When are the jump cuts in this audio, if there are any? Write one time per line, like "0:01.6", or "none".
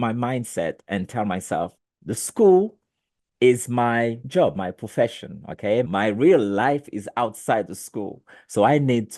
0:01.9
0:04.2
0:05.9